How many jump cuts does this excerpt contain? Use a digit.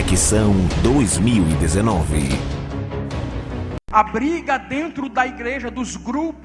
1